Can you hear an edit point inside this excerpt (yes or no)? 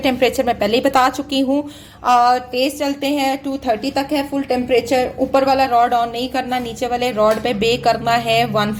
no